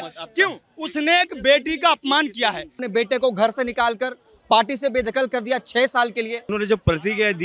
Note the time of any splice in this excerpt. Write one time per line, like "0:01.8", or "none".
0:02.8
0:06.5